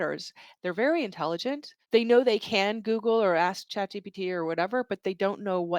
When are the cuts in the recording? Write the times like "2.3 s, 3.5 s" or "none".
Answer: 1.7 s, 3.6 s